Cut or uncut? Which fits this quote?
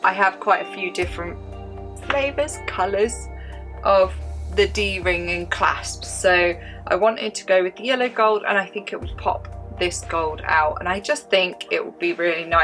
uncut